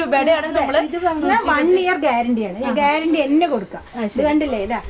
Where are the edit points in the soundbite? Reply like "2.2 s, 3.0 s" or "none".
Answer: none